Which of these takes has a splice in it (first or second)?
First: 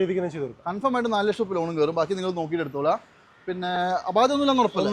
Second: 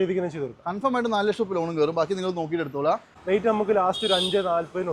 second